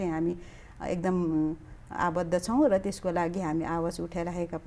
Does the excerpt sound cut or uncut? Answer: uncut